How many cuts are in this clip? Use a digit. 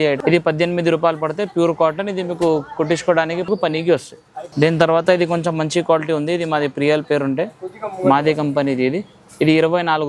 0